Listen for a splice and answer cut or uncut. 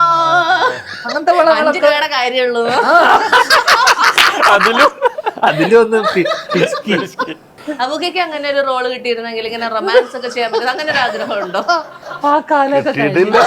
uncut